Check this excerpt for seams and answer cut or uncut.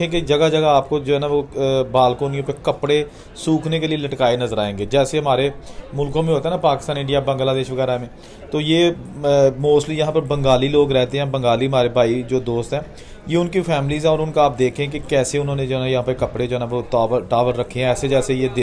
uncut